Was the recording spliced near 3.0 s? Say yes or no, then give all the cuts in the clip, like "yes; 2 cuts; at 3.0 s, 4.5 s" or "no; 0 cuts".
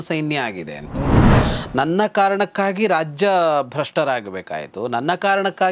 no; 1 cut; at 1.4 s